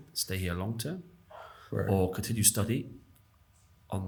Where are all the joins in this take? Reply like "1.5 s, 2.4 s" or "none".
none